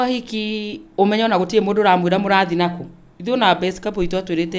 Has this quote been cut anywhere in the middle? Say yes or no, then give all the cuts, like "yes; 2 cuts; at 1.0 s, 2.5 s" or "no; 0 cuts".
no; 0 cuts